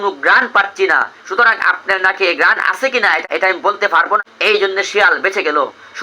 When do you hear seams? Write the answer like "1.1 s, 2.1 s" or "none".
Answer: 3.2 s